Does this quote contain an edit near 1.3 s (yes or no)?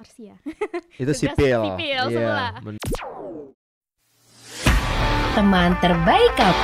no